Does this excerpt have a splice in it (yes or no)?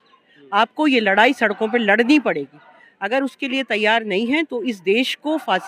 no